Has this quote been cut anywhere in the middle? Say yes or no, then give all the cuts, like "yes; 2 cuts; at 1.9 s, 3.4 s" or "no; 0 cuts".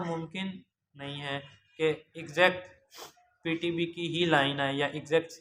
no; 0 cuts